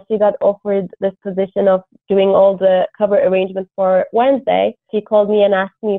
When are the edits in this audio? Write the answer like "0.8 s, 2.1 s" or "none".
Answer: 4.9 s